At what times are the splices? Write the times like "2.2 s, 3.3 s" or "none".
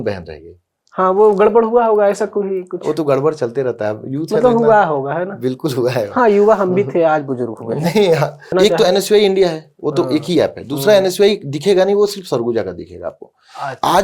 8.5 s